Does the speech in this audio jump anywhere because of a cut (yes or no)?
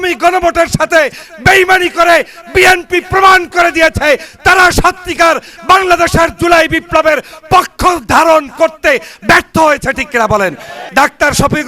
yes